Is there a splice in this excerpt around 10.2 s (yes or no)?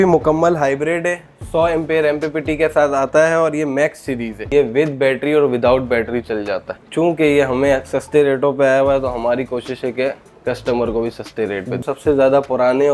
no